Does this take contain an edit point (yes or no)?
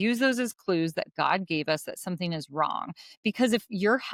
no